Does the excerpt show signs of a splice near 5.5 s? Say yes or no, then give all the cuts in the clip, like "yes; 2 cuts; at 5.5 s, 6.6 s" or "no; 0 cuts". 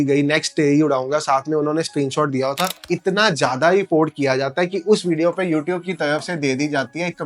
no; 1 cut; at 2.8 s